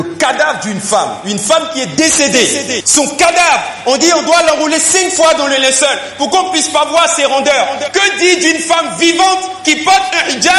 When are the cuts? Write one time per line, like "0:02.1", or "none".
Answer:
none